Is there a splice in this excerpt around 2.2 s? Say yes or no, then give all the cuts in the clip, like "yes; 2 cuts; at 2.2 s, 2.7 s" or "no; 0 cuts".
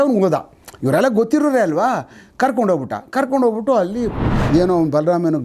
no; 1 cut; at 4.2 s